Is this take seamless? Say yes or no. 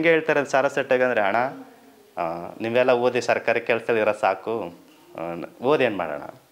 yes